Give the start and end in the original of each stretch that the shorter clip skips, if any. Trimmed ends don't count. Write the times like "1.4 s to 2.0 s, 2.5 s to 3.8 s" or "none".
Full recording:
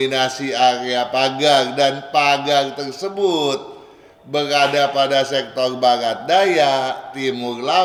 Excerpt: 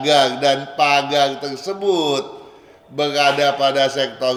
none